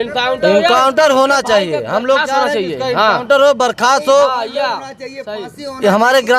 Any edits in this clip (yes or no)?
no